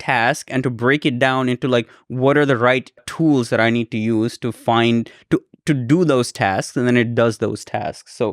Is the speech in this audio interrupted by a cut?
no; 0 cuts

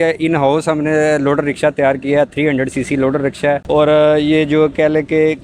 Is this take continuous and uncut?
yes; 0 cuts

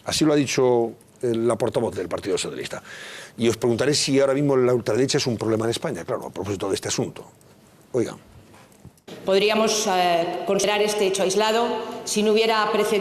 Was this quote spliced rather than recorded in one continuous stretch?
yes; 1 cut; at 1.6 s

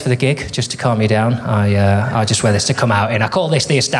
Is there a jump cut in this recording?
no; 0 cuts

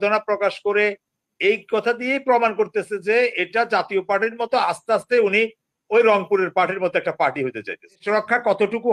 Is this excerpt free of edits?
no; 1 cut; at 8.0 s

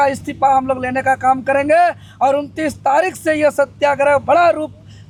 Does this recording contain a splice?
no; 0 cuts

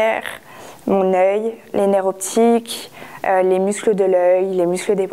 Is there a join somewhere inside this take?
no; 0 cuts

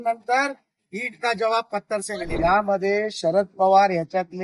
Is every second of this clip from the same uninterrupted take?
no; 1 cut; at 2.4 s

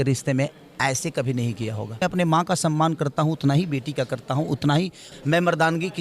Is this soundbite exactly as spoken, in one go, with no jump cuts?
no; 2 cuts; at 2.0 s, 5.0 s

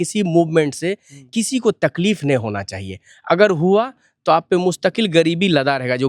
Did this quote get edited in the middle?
no; 0 cuts

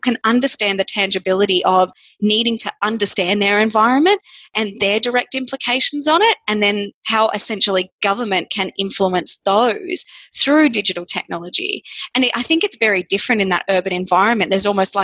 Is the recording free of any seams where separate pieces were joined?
no; 1 cut; at 7.0 s

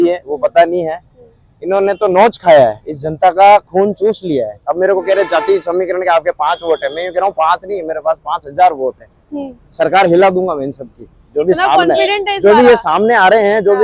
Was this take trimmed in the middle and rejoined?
yes; 1 cut; at 4.6 s

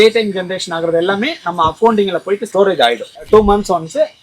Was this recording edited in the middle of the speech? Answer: yes; 1 cut; at 3.2 s

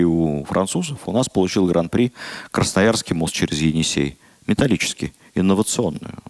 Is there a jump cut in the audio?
no; 0 cuts

